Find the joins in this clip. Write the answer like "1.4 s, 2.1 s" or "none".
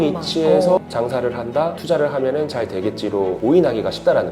1.8 s, 3.4 s